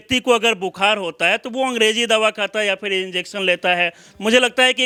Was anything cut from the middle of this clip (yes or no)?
no